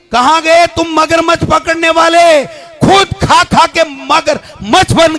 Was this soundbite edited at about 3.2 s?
no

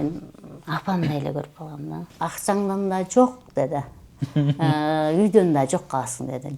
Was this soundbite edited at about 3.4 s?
no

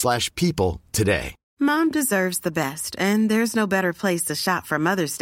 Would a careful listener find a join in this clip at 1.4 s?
yes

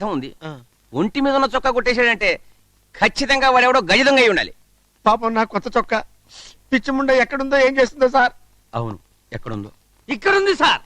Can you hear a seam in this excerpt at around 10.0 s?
no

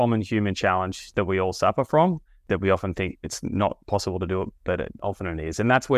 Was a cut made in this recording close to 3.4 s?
no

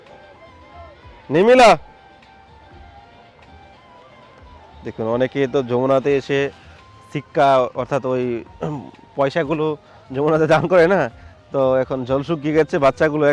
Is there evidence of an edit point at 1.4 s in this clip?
no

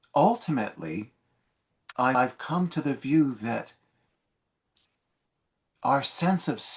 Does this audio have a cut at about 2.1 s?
yes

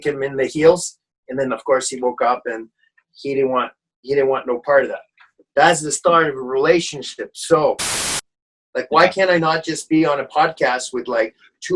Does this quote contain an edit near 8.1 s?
yes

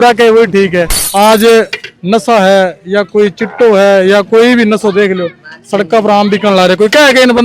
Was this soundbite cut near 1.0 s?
yes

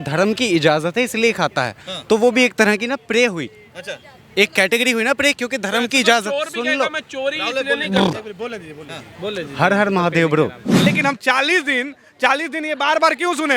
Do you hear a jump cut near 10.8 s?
yes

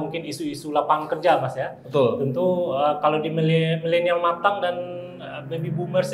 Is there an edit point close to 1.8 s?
no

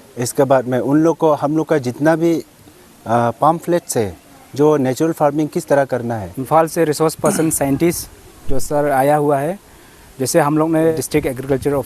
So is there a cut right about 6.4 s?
yes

